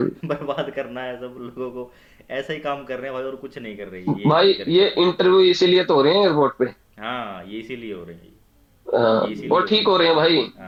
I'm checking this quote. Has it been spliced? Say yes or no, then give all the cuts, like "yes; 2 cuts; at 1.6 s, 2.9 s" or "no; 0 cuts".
no; 0 cuts